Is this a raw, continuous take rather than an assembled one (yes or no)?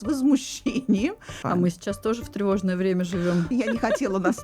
no